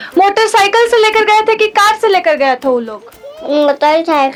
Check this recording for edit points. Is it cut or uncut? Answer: uncut